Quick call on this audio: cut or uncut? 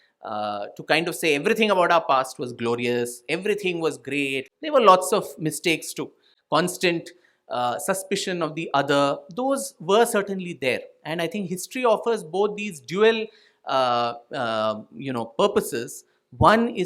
cut